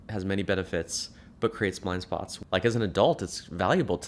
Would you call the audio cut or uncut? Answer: cut